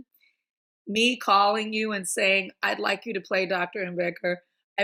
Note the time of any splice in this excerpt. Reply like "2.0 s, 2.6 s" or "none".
none